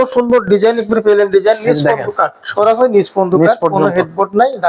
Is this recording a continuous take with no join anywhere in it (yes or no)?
yes